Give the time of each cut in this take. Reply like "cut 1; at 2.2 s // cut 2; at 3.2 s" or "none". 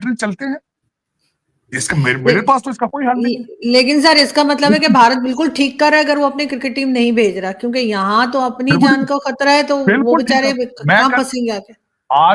none